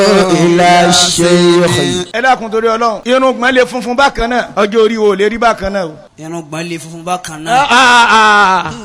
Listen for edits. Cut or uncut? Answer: cut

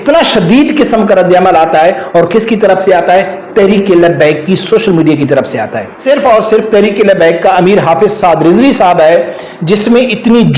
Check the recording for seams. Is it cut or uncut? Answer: cut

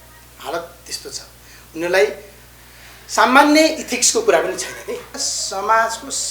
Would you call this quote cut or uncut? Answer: cut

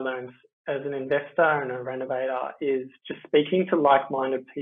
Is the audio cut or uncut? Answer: uncut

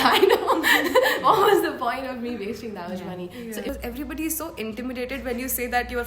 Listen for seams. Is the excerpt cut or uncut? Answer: cut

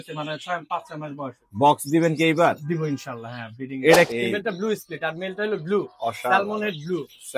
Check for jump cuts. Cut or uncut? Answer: cut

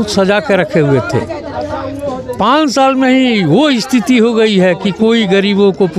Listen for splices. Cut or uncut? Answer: uncut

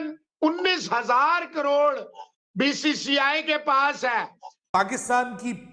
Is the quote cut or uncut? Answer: cut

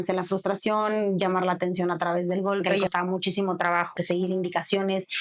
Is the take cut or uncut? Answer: cut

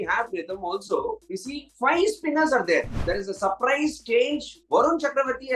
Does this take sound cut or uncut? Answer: cut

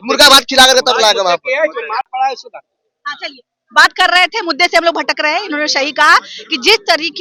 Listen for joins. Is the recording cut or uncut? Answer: uncut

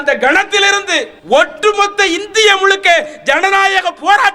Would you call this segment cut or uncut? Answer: cut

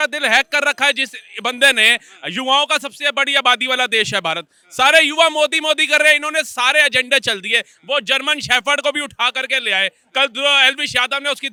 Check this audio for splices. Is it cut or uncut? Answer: uncut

